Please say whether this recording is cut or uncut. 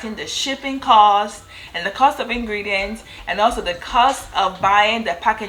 uncut